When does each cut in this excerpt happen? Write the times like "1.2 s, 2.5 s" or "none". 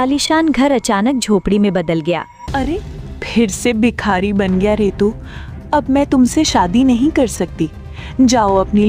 2.3 s